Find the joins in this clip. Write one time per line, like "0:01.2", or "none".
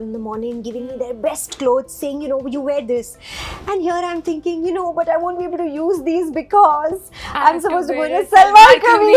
none